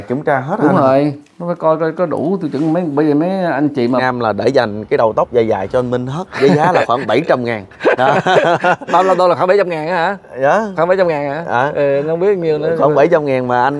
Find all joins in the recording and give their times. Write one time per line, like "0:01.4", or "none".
0:04.0